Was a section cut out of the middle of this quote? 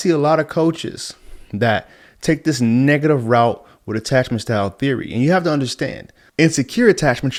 no; 0 cuts

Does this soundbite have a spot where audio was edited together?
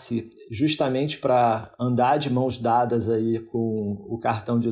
no; 0 cuts

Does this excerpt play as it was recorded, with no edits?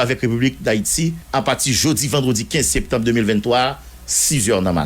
no; 1 cut; at 1.2 s

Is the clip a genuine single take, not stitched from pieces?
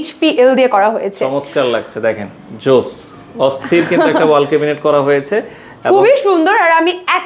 yes; 0 cuts

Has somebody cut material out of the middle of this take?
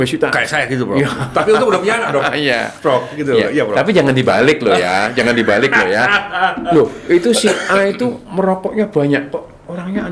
no; 0 cuts

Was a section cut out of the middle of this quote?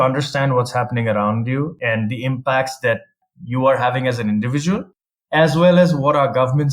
yes; 1 cut; at 1.8 s

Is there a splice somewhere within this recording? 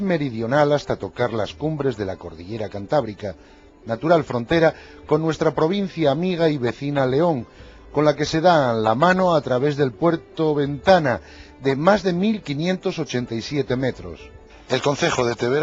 yes; 1 cut; at 1.9 s

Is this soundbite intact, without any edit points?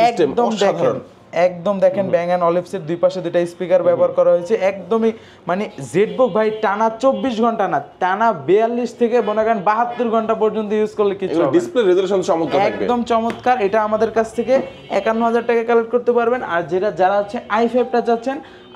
yes; 0 cuts

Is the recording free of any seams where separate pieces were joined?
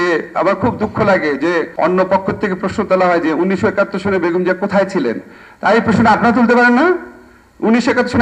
no; 1 cut; at 1.7 s

